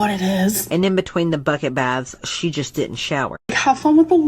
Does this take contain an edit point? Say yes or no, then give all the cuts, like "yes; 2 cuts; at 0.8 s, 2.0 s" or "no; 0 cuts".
yes; 1 cut; at 3.3 s